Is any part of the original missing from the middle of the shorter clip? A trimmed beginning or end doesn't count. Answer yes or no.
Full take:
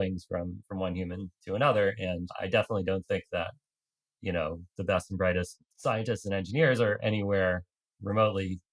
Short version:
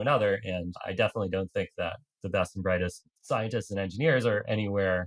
yes